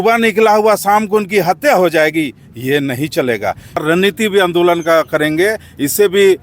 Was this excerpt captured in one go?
no; 1 cut; at 3.8 s

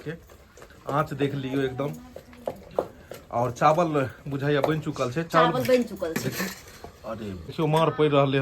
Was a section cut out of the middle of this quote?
yes; 1 cut; at 7.4 s

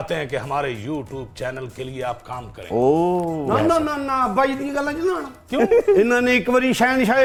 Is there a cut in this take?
no; 0 cuts

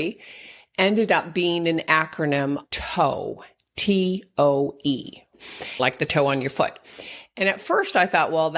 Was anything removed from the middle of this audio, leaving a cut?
yes; 2 cuts; at 2.6 s, 5.8 s

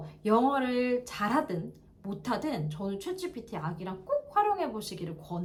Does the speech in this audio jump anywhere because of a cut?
no; 0 cuts

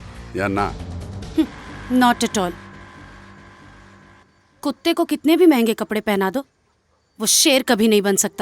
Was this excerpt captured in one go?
no; 1 cut; at 4.2 s

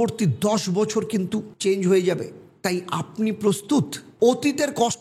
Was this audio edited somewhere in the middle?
yes; 2 cuts; at 1.5 s, 4.0 s

